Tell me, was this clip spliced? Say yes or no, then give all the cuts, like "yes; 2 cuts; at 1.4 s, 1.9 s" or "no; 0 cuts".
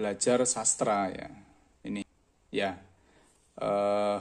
yes; 1 cut; at 2.0 s